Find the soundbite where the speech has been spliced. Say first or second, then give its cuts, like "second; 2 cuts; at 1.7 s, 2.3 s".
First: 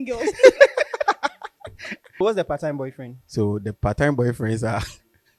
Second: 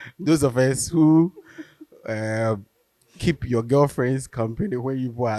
first; 1 cut; at 2.1 s